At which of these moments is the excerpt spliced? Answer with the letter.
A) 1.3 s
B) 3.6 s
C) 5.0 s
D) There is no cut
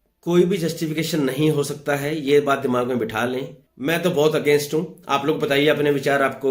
B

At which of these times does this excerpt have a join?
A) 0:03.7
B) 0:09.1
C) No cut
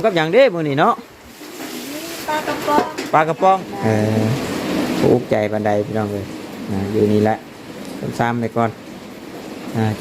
A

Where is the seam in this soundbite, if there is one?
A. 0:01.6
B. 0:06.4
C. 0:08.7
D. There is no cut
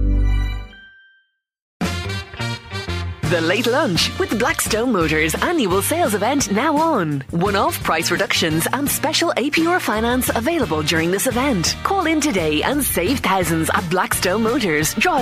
A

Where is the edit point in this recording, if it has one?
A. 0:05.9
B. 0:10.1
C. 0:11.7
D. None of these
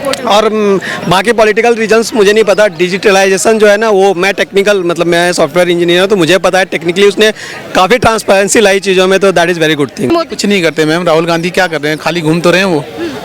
B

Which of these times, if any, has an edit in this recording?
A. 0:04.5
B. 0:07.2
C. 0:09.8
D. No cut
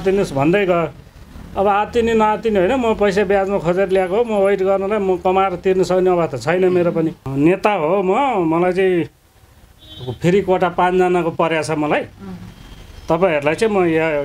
B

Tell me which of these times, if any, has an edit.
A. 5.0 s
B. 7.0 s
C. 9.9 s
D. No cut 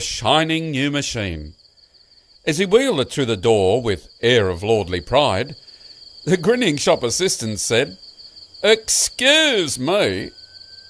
B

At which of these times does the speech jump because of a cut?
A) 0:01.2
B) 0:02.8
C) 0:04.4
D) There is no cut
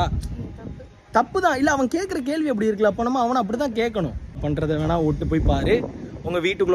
C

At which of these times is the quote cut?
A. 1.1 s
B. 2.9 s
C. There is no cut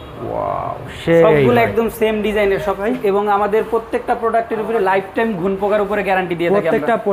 B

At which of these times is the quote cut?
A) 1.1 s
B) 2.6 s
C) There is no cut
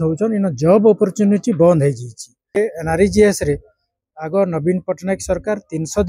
B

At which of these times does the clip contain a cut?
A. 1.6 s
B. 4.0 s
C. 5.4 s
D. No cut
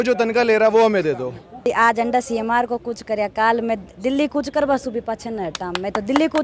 A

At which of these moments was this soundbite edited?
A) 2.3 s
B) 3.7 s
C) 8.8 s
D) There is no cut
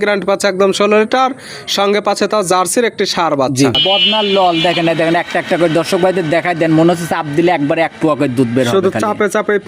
B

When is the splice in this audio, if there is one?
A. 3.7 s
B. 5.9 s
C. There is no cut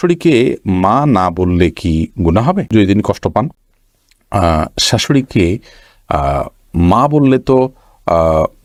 C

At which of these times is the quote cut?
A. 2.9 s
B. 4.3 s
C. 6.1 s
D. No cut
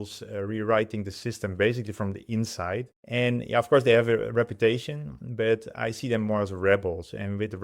A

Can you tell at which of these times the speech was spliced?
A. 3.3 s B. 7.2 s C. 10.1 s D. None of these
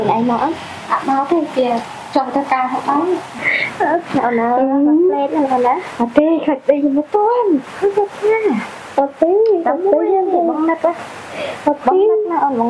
A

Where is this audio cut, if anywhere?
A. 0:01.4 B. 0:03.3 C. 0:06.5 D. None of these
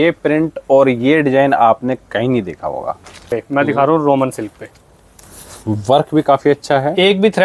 B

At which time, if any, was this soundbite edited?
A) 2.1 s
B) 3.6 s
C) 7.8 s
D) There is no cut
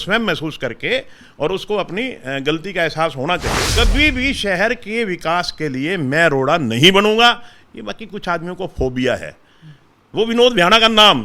B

